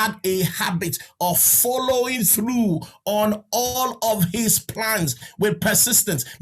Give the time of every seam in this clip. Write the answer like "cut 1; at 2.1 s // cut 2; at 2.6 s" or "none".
none